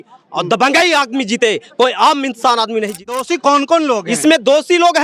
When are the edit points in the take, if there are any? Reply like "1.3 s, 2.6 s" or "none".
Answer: 3.2 s